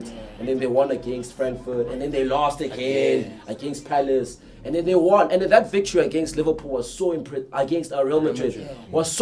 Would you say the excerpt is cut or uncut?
uncut